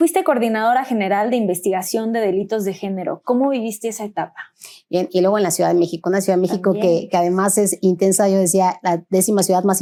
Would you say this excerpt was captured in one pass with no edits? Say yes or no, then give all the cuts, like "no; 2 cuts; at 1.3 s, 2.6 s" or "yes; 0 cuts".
yes; 0 cuts